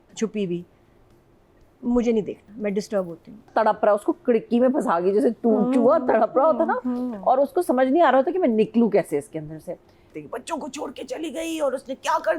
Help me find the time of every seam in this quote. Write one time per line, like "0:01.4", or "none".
0:03.5
0:10.1